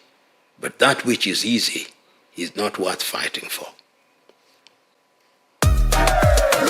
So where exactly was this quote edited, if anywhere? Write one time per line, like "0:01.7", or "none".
0:04.9